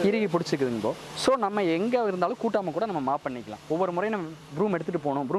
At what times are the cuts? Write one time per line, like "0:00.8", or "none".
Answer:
none